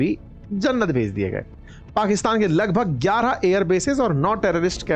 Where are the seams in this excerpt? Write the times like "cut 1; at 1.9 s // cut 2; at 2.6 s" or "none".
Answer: none